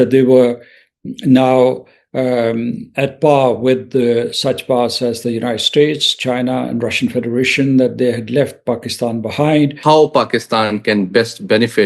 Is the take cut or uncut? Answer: cut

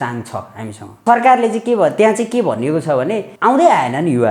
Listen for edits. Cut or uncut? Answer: cut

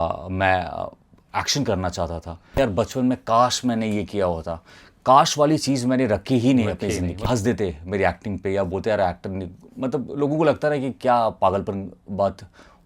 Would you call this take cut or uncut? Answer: cut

